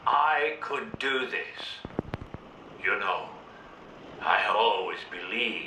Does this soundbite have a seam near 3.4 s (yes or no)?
no